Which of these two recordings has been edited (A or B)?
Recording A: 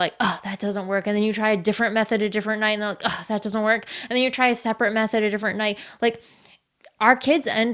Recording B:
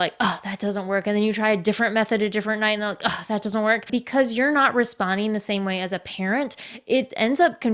B